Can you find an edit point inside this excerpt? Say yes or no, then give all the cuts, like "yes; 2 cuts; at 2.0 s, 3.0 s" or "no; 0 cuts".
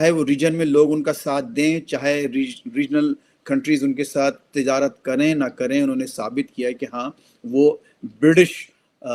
no; 0 cuts